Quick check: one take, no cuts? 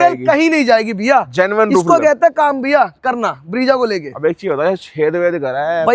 yes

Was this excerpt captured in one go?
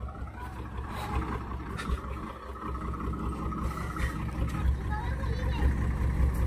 no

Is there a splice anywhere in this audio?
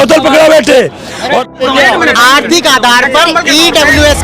yes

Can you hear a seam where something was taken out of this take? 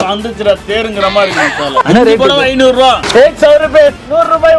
yes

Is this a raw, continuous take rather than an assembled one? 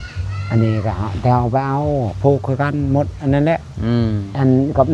yes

